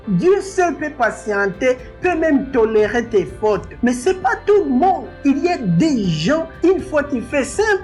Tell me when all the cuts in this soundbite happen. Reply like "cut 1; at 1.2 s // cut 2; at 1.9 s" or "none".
none